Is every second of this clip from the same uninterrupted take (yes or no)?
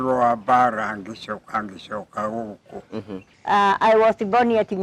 no